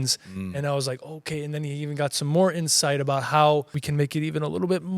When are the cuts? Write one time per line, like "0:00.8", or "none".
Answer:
0:03.8